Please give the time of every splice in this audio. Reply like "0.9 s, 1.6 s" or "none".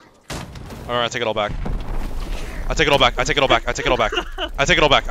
none

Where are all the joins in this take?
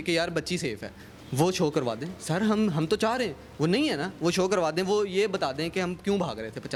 none

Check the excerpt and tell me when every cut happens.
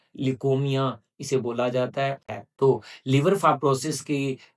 2.2 s

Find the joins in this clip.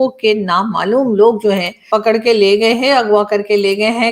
1.8 s

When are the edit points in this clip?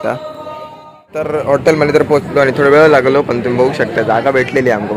1.3 s

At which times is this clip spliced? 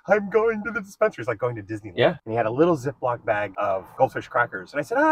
2.2 s, 3.8 s

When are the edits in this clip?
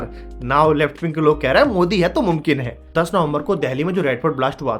2.8 s

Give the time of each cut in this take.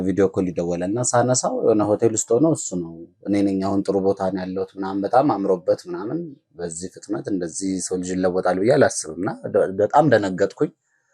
none

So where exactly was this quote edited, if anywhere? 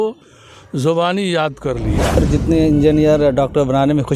2.2 s

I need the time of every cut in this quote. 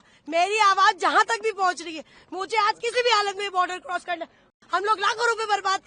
4.5 s

